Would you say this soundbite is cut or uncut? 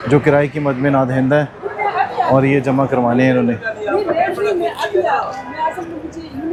uncut